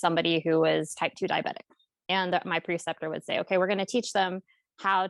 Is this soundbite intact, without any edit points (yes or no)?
yes